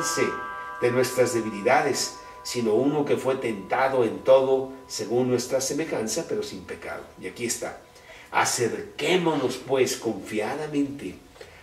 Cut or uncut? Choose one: uncut